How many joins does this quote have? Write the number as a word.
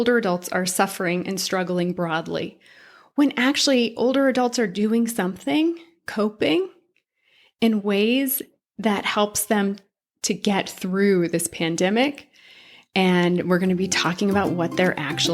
zero